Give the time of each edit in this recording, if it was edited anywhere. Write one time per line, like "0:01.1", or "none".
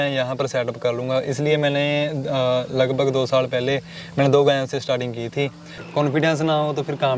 0:05.6